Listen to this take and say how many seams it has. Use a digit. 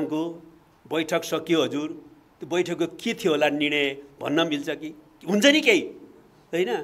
0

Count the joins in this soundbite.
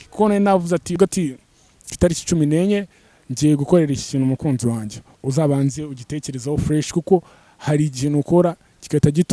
1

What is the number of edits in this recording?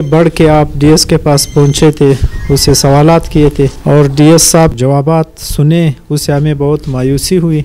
2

